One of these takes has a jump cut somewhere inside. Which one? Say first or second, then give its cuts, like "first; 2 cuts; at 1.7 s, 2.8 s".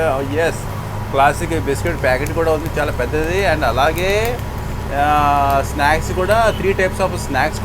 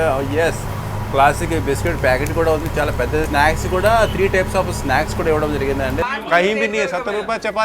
second; 2 cuts; at 3.3 s, 6.0 s